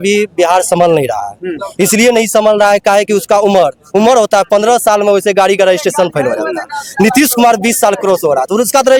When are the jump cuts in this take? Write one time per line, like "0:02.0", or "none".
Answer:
none